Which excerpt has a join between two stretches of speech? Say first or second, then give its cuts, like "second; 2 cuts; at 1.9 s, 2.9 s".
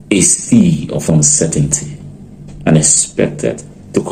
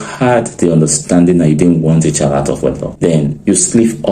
second; 1 cut; at 2.9 s